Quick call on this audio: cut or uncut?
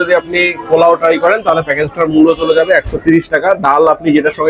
uncut